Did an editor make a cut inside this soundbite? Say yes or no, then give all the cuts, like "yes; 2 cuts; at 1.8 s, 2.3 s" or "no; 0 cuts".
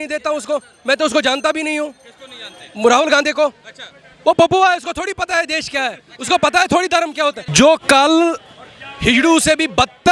yes; 1 cut; at 7.4 s